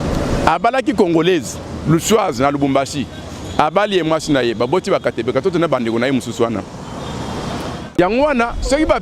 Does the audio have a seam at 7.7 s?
yes; 1 cut; at 7.7 s

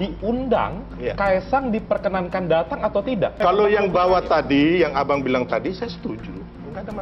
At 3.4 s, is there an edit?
yes; 1 cut; at 3.4 s

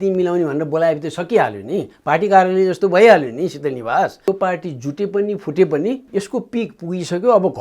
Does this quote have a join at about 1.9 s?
no; 2 cuts; at 4.3 s, 6.0 s

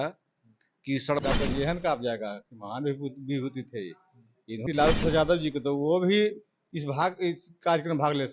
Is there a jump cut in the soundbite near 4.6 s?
yes; 2 cuts; at 1.2 s, 4.6 s

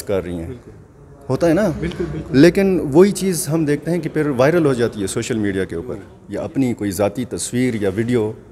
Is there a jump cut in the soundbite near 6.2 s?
yes; 1 cut; at 6.2 s

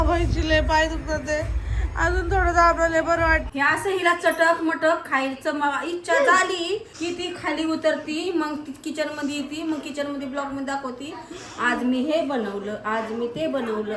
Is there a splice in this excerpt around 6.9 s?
yes; 2 cuts; at 3.5 s, 6.9 s

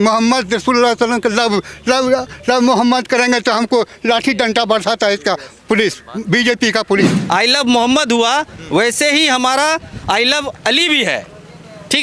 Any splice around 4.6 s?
no; 1 cut; at 7.2 s

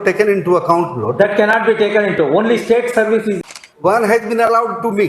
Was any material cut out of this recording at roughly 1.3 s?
no; 1 cut; at 3.3 s

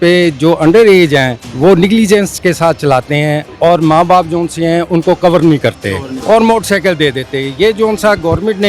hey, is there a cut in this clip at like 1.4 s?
yes; 3 cuts; at 1.4 s, 3.5 s, 6.1 s

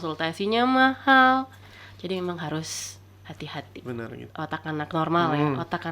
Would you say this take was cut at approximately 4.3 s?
yes; 1 cut; at 4.3 s

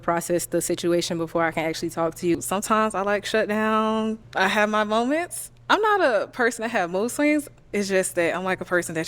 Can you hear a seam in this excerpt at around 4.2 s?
yes; 2 cuts; at 2.3 s, 4.2 s

